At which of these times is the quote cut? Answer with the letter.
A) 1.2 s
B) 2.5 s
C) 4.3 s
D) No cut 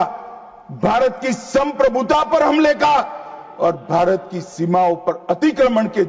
D